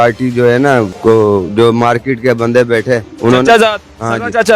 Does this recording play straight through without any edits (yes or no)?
no